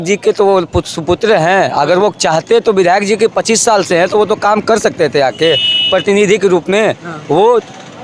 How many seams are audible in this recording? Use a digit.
0